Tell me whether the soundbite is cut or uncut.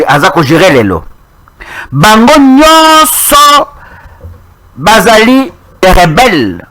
cut